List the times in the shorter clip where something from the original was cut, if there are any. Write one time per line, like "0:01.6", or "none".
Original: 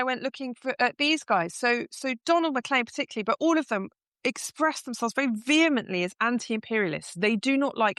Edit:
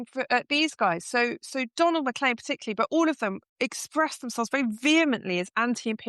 0:03.4